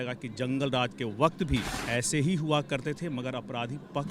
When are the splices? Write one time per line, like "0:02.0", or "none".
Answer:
0:01.8